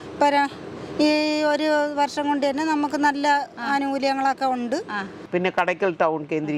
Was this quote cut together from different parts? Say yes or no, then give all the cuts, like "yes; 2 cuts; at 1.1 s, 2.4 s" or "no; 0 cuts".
yes; 1 cut; at 5.3 s